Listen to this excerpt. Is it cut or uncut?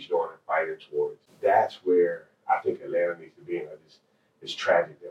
cut